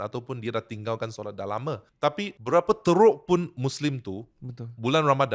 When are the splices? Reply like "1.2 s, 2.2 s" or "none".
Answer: 2.0 s